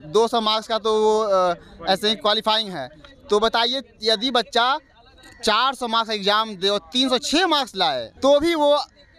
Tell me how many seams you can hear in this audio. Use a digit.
1